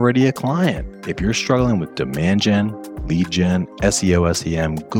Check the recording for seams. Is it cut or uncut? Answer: uncut